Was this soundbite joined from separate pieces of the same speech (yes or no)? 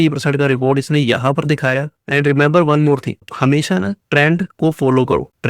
yes